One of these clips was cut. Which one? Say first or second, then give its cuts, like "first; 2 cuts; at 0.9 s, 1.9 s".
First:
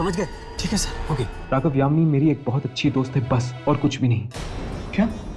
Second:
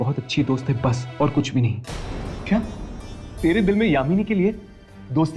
first; 1 cut; at 1.4 s